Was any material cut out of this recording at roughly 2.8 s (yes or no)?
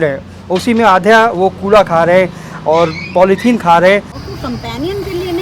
no